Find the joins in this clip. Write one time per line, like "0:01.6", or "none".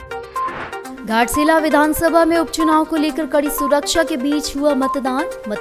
0:00.9